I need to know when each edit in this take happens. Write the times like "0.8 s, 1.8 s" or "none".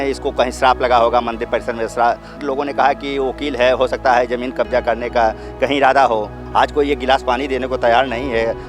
2.4 s, 6.4 s